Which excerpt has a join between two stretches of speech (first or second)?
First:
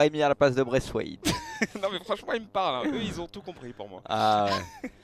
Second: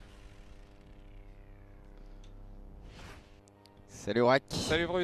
first